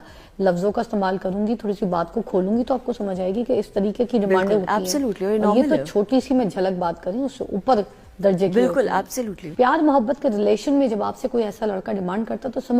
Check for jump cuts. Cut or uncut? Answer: cut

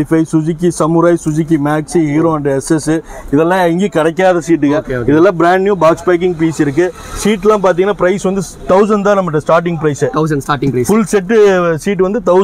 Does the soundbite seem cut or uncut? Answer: uncut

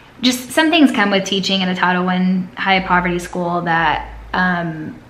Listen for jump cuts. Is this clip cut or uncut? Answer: uncut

